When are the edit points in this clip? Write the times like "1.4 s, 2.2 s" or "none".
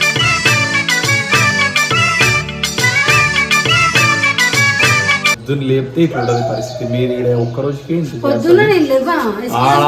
5.4 s

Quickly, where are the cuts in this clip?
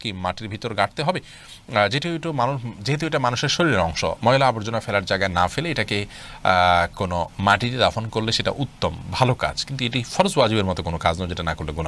none

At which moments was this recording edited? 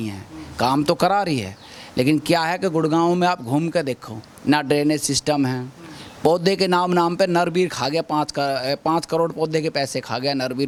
none

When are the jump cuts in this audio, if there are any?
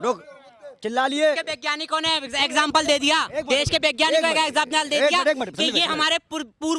1.4 s

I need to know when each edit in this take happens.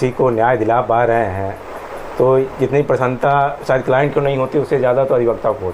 none

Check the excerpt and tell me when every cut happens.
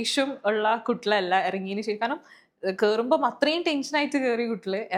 none

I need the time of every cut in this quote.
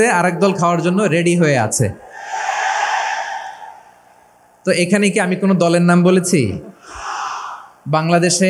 none

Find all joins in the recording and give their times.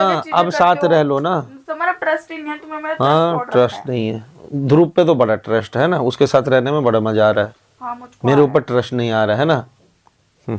none

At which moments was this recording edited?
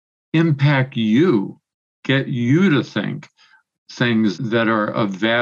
4.4 s

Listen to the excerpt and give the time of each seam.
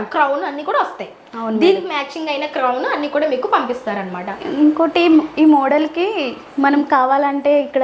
none

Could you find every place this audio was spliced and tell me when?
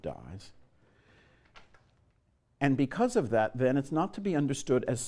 none

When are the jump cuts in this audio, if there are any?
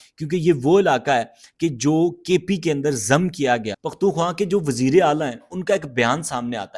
3.8 s

